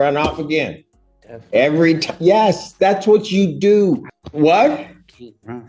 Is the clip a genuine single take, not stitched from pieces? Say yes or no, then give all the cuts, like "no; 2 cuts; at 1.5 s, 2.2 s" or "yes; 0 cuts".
no; 1 cut; at 4.2 s